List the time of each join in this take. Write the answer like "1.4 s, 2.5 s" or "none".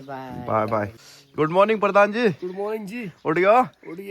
1.0 s